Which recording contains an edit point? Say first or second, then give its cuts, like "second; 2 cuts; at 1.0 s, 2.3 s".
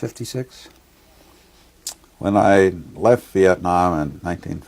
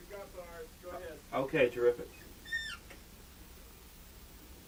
first; 1 cut; at 2.9 s